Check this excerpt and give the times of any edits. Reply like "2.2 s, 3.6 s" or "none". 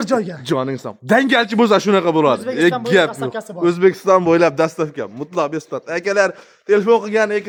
none